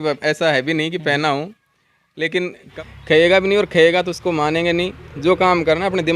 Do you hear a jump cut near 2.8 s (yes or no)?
yes